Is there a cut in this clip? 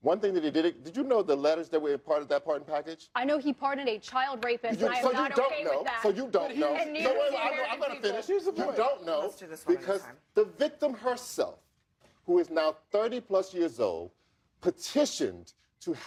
no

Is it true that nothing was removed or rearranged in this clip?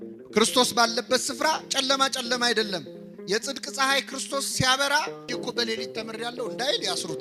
no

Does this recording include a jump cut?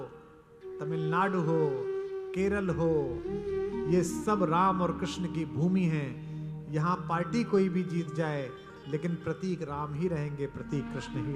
no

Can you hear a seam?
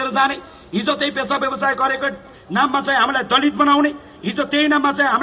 no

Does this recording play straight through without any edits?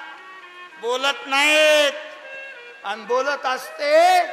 yes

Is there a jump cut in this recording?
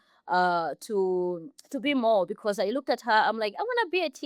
no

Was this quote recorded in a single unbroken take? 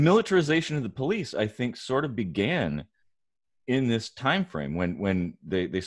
yes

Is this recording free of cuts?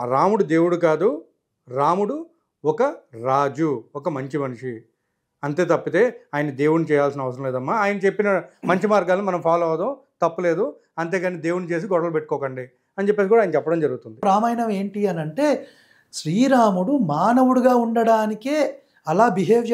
no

